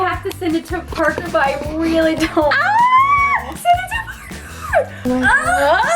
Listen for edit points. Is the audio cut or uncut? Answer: cut